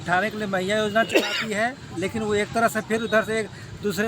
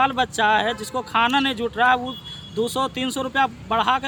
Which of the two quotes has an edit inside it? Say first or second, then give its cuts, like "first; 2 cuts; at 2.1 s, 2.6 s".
first; 1 cut; at 1.9 s